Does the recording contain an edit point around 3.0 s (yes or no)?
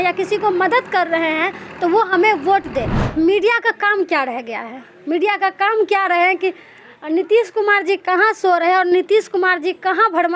yes